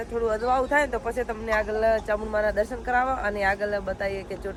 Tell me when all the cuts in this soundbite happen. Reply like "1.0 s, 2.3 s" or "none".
none

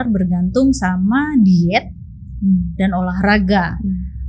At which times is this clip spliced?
none

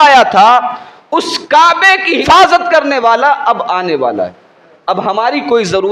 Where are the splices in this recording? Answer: 2.2 s

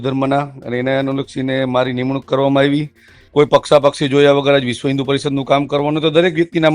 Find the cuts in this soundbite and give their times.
3.2 s

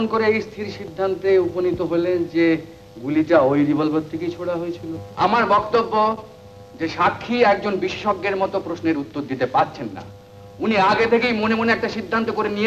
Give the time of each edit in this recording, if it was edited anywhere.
5.0 s

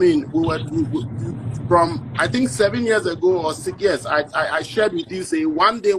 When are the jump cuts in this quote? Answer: none

